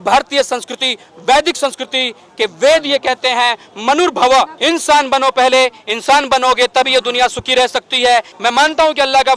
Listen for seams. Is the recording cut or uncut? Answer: cut